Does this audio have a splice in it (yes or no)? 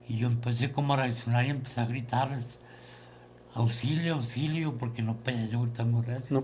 no